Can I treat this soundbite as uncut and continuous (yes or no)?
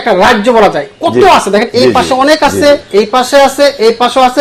yes